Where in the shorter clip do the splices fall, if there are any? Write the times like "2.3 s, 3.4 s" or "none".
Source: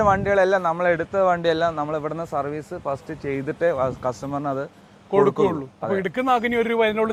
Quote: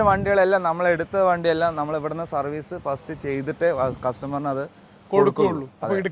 none